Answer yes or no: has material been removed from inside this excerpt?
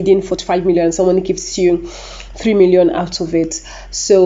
no